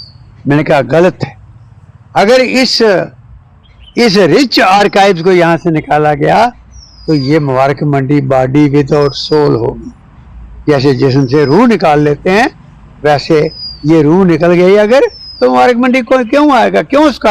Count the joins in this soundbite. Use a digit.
0